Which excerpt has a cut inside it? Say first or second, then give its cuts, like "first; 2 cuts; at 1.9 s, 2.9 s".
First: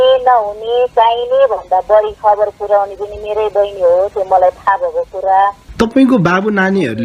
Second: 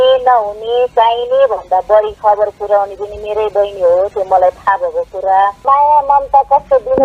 second; 1 cut; at 5.6 s